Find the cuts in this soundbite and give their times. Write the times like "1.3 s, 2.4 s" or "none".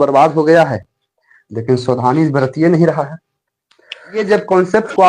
4.2 s